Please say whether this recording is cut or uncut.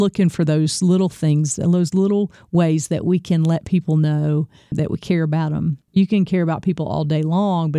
cut